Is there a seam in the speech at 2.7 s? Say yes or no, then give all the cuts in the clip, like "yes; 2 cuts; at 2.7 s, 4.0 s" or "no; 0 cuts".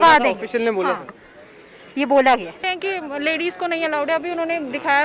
yes; 1 cut; at 2.7 s